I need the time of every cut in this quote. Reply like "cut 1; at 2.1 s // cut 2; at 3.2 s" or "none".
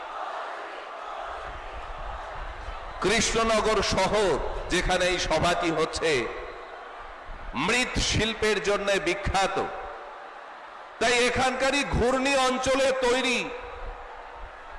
cut 1; at 13.8 s